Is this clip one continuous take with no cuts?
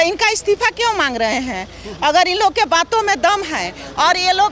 yes; 0 cuts

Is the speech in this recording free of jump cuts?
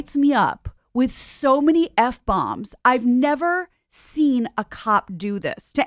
yes; 0 cuts

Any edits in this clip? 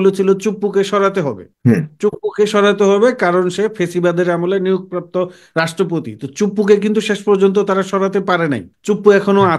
yes; 2 cuts; at 1.4 s, 8.7 s

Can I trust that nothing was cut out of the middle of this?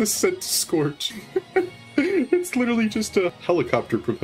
no; 2 cuts; at 1.1 s, 3.4 s

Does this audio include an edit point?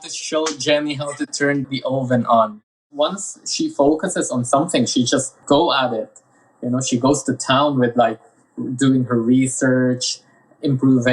yes; 1 cut; at 2.8 s

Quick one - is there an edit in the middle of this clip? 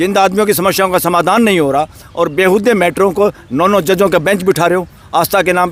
no; 0 cuts

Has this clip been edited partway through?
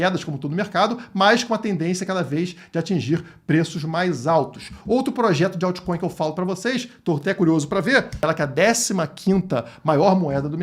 yes; 1 cut; at 8.2 s

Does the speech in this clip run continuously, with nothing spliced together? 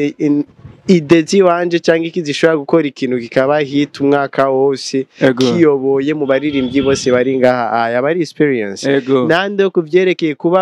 yes; 0 cuts

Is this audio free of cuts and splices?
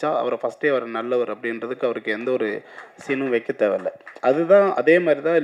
yes; 0 cuts

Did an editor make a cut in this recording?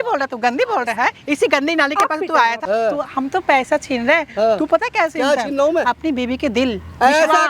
yes; 1 cut; at 2.6 s

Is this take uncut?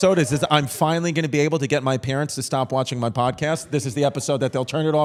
yes; 0 cuts

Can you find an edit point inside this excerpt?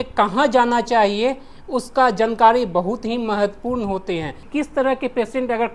yes; 1 cut; at 4.4 s

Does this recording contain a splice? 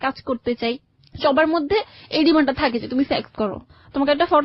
no; 0 cuts

